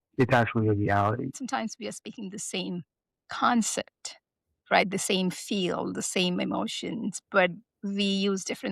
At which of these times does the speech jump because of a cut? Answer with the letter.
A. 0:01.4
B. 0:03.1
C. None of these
A